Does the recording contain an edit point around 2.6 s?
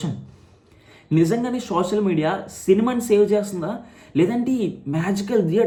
no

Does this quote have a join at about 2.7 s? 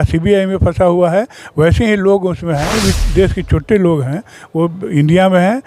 yes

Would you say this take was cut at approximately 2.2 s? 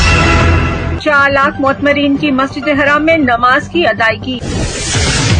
no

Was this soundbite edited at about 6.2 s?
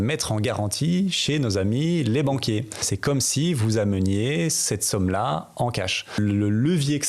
yes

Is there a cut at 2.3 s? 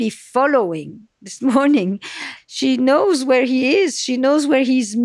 yes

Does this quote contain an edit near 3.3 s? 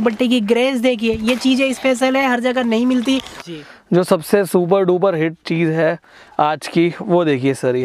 yes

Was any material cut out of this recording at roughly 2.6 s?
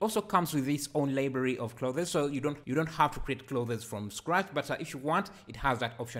yes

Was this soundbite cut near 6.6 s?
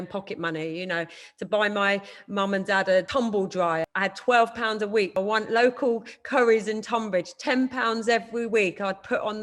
no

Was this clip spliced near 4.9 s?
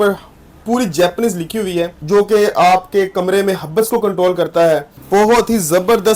yes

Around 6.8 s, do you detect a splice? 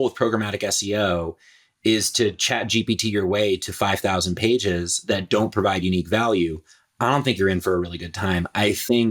no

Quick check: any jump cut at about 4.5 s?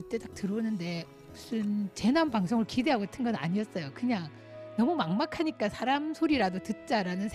no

